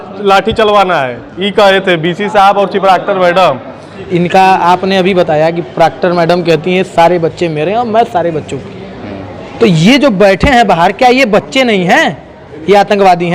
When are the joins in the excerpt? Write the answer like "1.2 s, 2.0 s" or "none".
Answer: 3.9 s